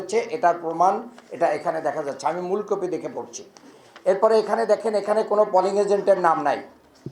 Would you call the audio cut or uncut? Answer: uncut